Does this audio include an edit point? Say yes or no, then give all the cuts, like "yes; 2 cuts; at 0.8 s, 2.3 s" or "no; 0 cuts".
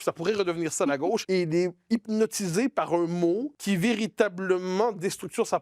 yes; 2 cuts; at 1.2 s, 3.5 s